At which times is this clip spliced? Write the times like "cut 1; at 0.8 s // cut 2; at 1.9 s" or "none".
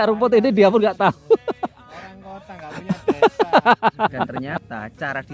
cut 1; at 4.3 s